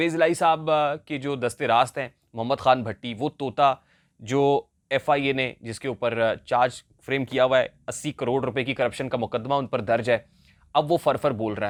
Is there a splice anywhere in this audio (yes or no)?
no